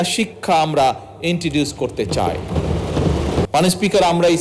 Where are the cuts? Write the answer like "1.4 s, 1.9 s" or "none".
3.5 s

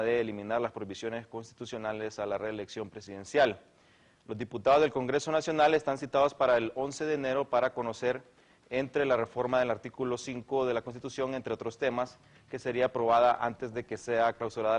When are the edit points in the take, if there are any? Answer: 4.3 s

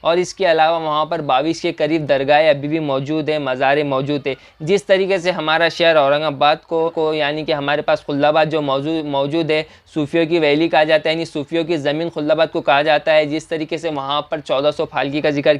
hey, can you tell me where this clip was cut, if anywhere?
6.9 s

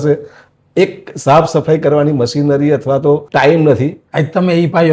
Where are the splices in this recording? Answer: 3.3 s, 4.0 s

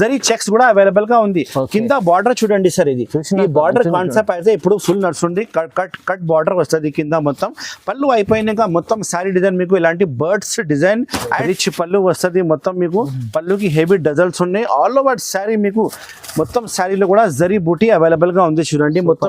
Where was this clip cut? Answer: 11.4 s

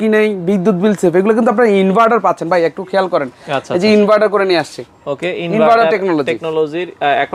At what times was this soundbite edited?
none

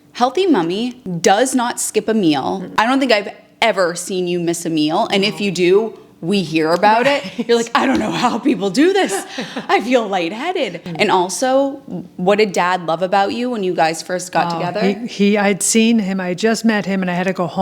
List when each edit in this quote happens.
1.0 s, 2.7 s, 10.8 s

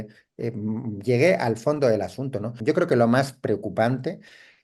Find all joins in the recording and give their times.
2.5 s

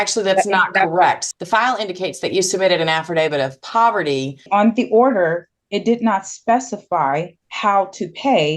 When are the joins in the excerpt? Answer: 1.2 s, 4.4 s, 7.4 s

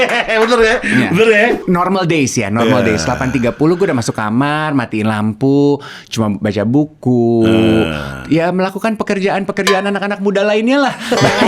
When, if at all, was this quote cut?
1.6 s

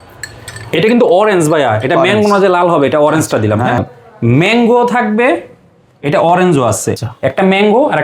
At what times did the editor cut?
3.8 s, 7.1 s

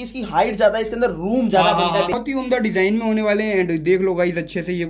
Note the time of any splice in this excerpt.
2.2 s

